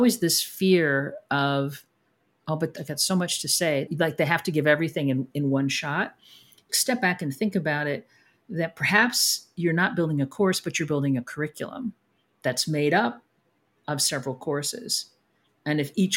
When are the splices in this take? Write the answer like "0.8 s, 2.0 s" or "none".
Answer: 2.7 s, 3.9 s, 6.7 s